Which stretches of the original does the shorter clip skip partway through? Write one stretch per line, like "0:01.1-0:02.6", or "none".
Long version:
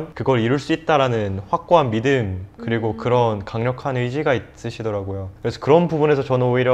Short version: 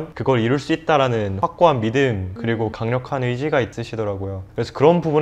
0:01.3-0:01.4
0:02.7-0:03.3
0:04.5-0:04.7